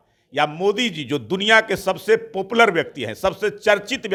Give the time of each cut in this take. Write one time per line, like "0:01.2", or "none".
none